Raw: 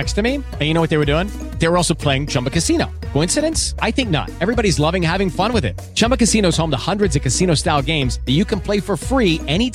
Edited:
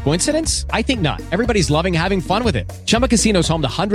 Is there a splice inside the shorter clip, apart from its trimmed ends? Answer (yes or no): no